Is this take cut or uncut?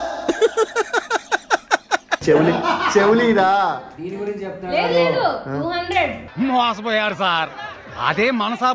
uncut